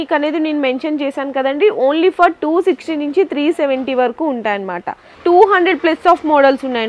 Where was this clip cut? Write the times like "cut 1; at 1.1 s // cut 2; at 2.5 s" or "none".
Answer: cut 1; at 5.2 s